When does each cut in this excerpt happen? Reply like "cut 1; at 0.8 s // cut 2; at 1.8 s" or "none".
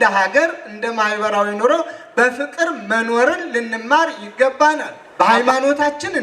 cut 1; at 5.0 s